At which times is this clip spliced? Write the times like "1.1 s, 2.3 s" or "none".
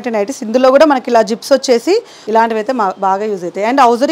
2.1 s